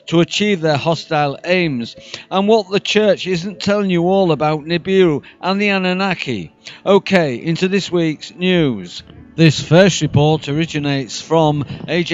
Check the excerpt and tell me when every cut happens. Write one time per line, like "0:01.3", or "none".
0:11.1